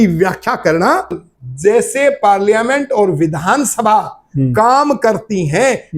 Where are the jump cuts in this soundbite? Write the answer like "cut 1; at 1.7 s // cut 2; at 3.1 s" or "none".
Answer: cut 1; at 1.2 s